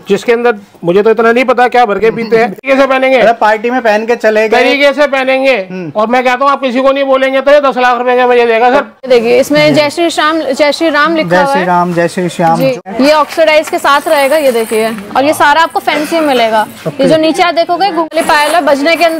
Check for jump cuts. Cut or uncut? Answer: cut